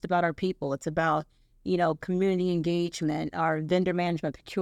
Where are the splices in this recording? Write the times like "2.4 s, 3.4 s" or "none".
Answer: none